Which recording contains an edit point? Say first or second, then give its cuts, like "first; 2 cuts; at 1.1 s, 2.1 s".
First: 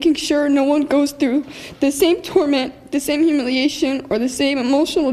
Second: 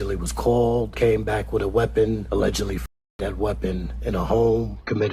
second; 2 cuts; at 0.9 s, 2.2 s